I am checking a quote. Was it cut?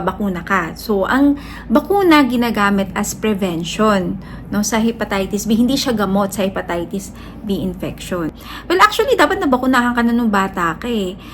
yes; 1 cut; at 8.4 s

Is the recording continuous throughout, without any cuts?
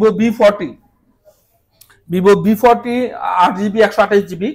yes; 0 cuts

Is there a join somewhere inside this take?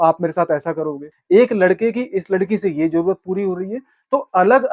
yes; 1 cut; at 1.1 s

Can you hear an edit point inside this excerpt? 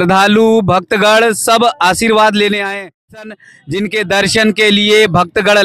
yes; 1 cut; at 3.2 s

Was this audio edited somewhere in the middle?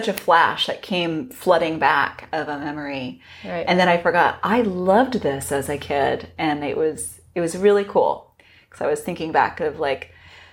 no; 0 cuts

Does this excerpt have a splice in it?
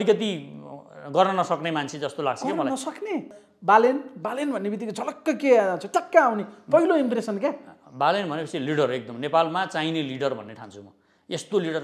yes; 1 cut; at 3.4 s

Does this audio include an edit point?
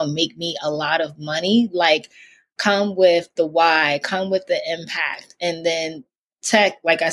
no; 0 cuts

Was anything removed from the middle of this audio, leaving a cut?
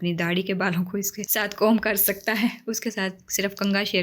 yes; 1 cut; at 1.2 s

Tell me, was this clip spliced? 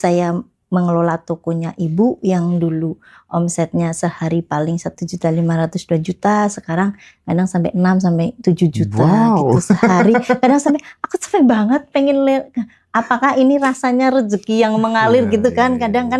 no; 0 cuts

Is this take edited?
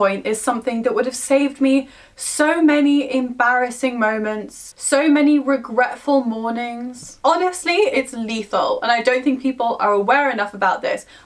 yes; 1 cut; at 7.2 s

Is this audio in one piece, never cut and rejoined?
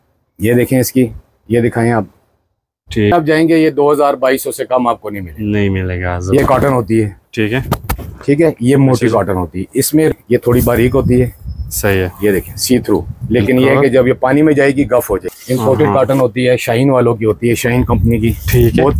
no; 4 cuts; at 3.1 s, 6.4 s, 10.1 s, 15.3 s

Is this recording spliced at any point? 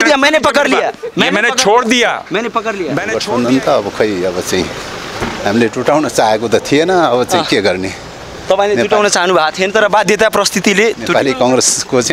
yes; 1 cut; at 2.9 s

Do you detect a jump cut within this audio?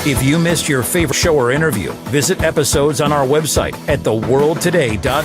yes; 1 cut; at 1.1 s

